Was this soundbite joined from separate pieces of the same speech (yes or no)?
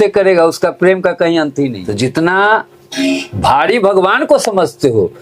yes